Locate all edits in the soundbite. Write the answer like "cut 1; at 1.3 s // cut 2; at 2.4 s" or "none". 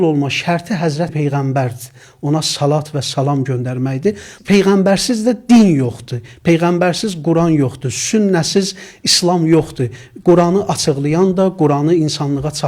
cut 1; at 1.1 s // cut 2; at 4.4 s